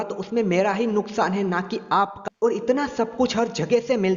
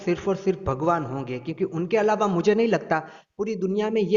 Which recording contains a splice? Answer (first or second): first